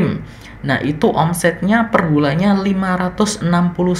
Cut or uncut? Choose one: uncut